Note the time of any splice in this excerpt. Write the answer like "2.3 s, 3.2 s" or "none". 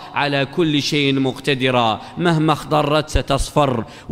none